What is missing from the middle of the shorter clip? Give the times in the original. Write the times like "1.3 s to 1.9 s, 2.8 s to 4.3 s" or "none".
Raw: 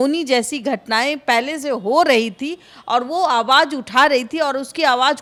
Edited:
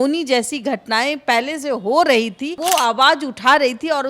2.6 s to 3.1 s